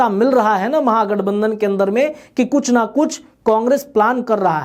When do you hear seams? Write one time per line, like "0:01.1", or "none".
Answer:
none